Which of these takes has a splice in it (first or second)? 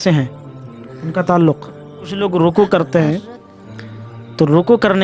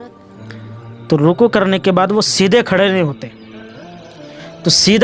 first